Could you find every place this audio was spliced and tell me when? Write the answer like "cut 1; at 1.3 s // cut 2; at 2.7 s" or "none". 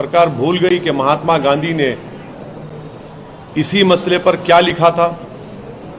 none